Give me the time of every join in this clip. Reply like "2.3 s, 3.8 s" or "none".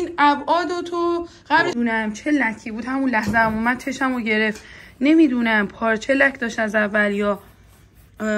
1.7 s